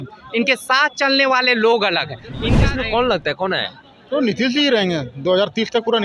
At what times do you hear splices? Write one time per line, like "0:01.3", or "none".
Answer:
0:02.4